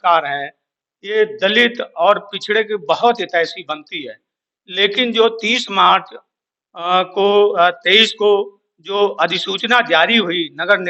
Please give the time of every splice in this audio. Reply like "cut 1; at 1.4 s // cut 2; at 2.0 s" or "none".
none